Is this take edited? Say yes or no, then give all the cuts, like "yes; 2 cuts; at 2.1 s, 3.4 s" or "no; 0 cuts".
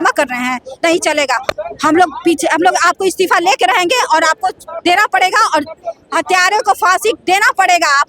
no; 0 cuts